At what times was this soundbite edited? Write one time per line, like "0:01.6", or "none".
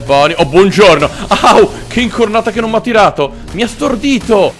none